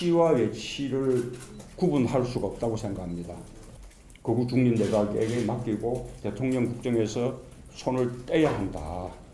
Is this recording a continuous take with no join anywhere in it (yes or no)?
yes